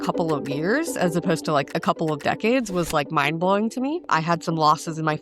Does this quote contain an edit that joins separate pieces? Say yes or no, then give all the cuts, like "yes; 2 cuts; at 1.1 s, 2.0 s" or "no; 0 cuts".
yes; 1 cut; at 4.0 s